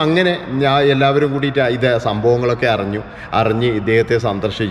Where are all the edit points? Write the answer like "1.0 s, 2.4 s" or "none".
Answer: none